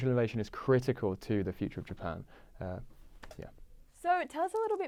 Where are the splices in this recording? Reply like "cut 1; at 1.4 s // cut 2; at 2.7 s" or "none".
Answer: none